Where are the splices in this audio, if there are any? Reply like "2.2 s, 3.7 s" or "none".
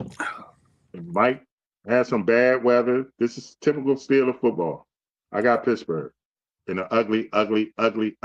none